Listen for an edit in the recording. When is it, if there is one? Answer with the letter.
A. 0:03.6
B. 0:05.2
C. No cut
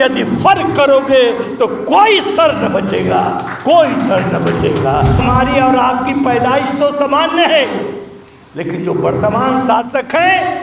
B